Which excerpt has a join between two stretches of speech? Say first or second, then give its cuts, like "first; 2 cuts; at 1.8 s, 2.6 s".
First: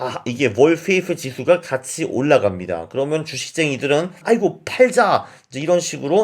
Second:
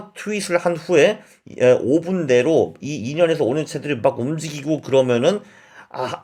first; 1 cut; at 4.2 s